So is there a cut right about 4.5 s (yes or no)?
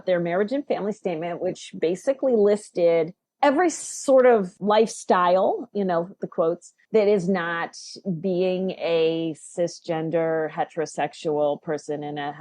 yes